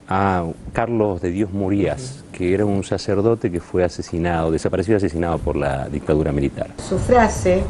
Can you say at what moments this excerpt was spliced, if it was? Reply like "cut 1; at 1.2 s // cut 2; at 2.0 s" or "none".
cut 1; at 6.7 s